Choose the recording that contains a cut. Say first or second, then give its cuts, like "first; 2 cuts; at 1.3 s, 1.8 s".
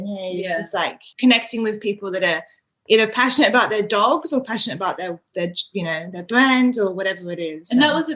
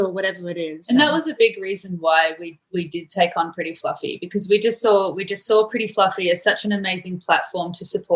first; 1 cut; at 1.0 s